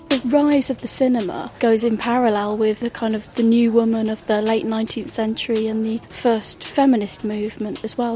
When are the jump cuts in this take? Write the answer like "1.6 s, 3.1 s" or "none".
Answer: 2.8 s, 6.1 s